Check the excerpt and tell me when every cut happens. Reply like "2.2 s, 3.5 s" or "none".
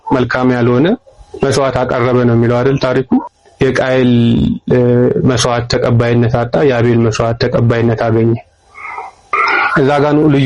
none